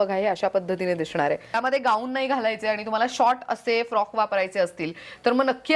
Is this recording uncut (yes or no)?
no